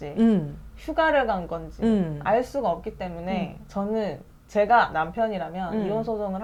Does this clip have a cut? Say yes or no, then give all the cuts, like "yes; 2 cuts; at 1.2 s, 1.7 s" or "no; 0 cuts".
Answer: no; 0 cuts